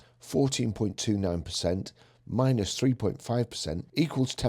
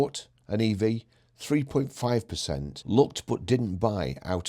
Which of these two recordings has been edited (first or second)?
second